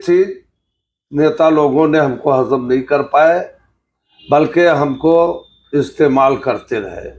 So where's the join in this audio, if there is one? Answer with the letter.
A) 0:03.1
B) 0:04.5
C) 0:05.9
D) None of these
D